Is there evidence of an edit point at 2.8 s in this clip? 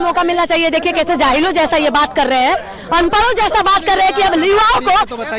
no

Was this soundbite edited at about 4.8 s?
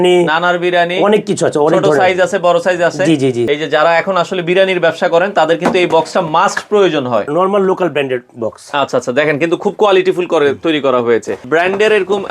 no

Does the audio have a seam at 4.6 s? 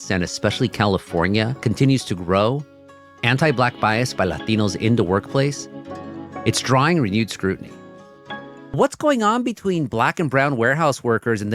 no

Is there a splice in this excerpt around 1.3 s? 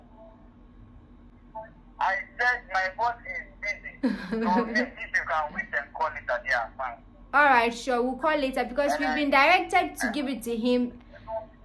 no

